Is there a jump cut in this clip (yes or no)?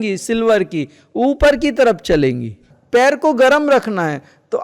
yes